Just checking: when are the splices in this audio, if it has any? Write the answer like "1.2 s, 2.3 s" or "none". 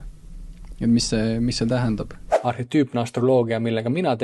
none